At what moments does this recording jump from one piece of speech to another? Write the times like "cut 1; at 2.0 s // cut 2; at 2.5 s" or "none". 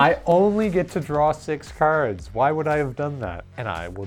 none